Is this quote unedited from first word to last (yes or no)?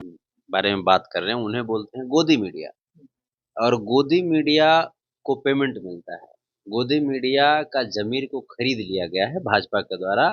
yes